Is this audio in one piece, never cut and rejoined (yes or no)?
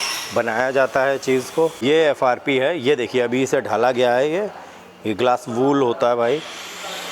no